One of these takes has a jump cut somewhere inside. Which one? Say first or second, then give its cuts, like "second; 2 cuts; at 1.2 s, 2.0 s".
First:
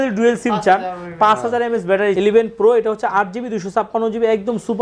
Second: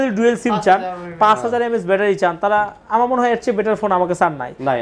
first; 1 cut; at 2.2 s